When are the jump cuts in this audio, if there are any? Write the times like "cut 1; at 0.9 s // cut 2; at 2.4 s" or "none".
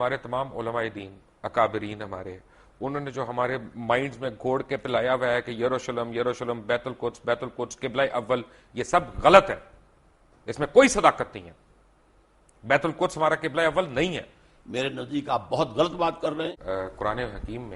cut 1; at 16.5 s